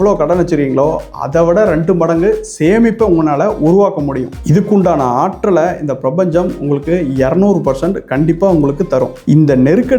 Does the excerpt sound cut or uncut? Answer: uncut